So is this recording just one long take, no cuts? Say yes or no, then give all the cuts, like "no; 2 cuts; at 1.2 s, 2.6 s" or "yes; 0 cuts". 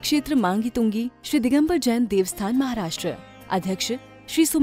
yes; 0 cuts